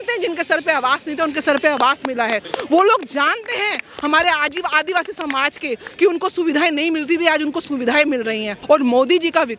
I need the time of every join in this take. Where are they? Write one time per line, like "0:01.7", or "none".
0:08.5